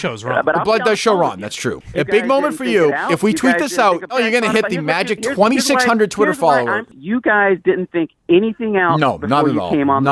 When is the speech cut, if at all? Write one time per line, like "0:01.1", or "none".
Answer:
0:01.7
0:04.1
0:06.8